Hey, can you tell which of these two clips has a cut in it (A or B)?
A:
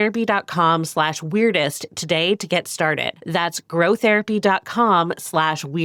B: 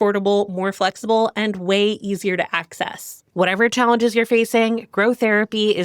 B